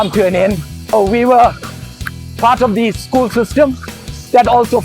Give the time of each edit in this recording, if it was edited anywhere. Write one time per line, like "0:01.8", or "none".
0:00.9